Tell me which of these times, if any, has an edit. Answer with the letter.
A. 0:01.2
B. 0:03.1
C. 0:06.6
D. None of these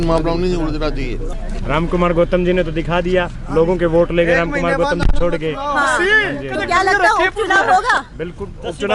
A